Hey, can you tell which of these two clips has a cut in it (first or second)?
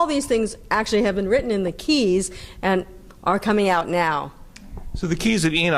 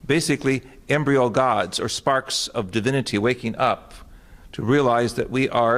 first